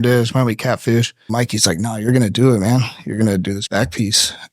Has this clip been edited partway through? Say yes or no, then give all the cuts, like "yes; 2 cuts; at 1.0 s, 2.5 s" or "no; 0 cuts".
yes; 2 cuts; at 1.3 s, 3.6 s